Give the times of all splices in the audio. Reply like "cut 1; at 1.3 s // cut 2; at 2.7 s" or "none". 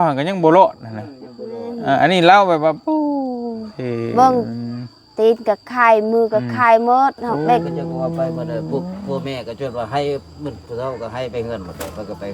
cut 1; at 7.7 s